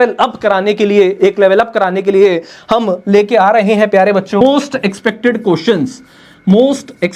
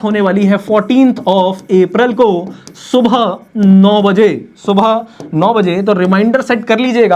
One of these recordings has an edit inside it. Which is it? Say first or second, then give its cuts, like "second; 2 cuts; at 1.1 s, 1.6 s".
first; 1 cut; at 4.4 s